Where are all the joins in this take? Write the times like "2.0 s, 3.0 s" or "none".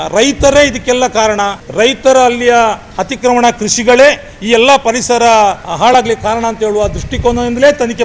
1.6 s, 5.7 s